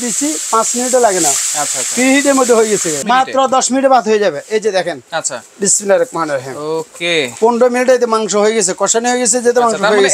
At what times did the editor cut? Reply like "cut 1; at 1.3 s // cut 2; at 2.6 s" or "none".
cut 1; at 3.0 s // cut 2; at 7.3 s